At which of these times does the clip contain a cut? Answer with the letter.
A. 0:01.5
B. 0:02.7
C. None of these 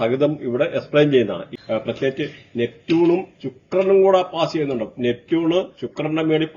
A